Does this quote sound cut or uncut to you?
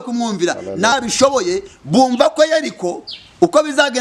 cut